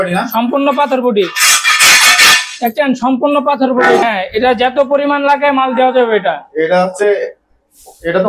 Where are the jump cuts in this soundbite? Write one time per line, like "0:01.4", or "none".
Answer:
0:04.0